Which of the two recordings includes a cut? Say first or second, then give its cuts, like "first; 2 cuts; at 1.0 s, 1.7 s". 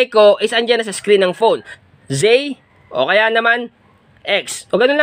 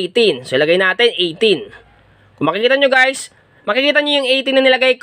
first; 1 cut; at 1.6 s